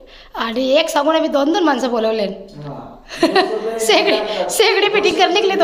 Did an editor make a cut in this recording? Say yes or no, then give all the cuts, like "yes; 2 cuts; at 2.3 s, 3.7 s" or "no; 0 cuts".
no; 0 cuts